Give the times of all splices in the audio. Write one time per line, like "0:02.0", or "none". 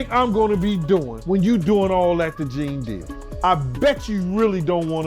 0:01.2
0:03.4